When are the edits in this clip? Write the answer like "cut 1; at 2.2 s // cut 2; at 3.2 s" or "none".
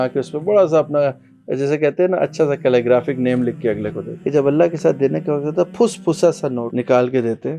cut 1; at 4.1 s // cut 2; at 6.7 s